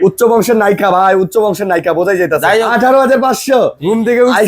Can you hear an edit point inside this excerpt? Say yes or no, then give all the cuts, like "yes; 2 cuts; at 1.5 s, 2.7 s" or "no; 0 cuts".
yes; 1 cut; at 2.7 s